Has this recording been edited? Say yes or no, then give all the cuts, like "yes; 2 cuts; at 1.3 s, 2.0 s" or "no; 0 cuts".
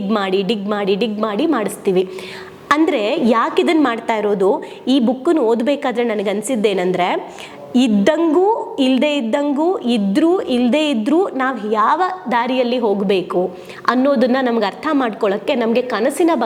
no; 0 cuts